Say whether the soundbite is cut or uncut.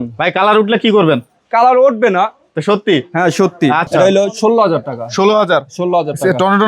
cut